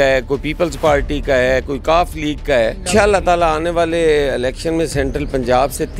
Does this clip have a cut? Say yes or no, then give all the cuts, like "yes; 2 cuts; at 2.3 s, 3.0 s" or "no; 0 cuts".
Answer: yes; 1 cut; at 2.9 s